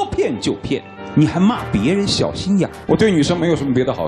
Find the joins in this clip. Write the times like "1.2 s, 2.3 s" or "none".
2.8 s